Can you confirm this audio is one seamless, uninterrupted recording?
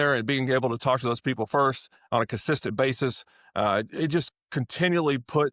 yes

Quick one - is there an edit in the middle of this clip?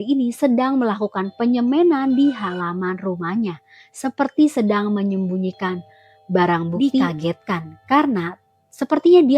yes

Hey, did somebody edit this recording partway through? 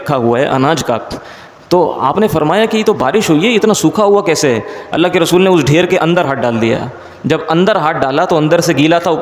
no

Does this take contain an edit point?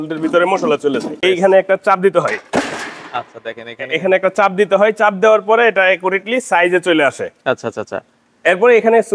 yes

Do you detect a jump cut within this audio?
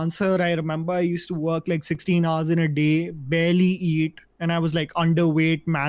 no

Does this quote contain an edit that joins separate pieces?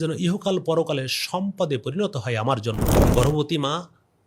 yes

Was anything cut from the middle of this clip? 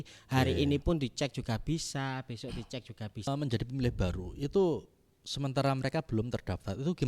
yes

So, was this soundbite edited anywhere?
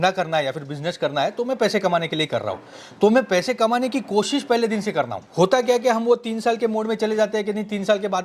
no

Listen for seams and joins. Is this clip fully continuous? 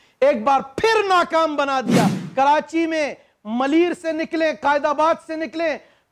no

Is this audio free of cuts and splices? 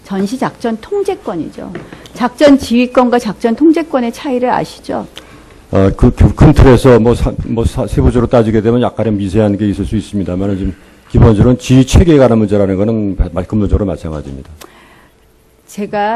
yes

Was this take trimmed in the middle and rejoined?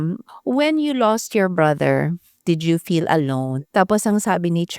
yes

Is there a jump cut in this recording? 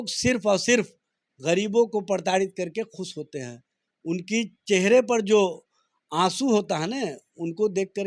no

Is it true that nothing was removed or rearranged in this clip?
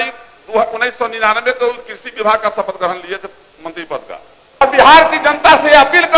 no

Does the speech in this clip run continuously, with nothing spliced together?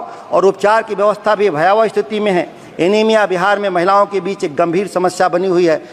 yes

